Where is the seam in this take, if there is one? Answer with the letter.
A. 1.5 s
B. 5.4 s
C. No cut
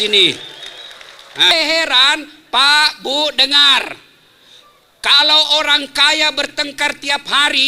A